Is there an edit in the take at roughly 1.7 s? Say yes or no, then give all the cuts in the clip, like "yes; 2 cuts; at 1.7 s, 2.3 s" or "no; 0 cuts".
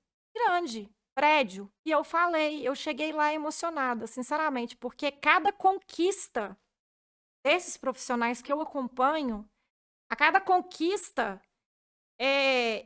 yes; 1 cut; at 1.7 s